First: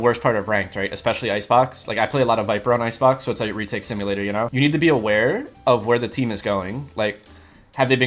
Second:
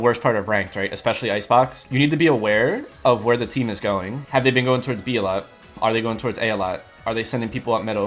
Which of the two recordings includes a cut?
second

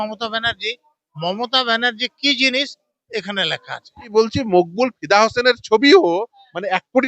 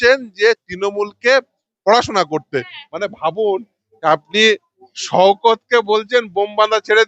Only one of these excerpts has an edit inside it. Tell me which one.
first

